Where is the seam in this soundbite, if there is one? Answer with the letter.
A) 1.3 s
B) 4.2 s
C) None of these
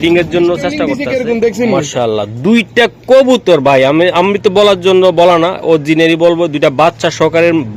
A